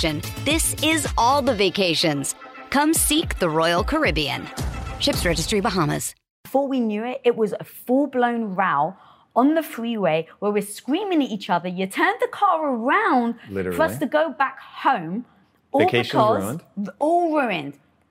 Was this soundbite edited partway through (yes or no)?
yes